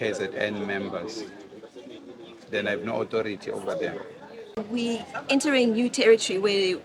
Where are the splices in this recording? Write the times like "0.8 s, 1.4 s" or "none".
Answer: 4.6 s